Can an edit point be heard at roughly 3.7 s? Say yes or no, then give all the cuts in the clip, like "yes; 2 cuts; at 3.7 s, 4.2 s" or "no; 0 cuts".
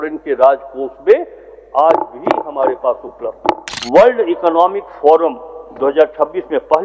yes; 1 cut; at 3.7 s